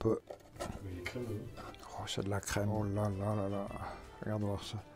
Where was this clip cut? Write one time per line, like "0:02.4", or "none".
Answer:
none

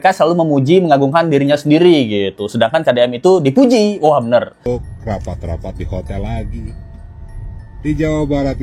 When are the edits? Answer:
0:04.7

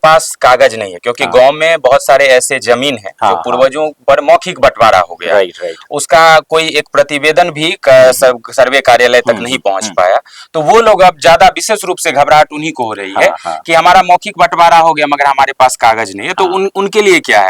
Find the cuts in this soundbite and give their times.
none

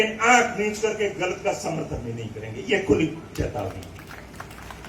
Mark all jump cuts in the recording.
none

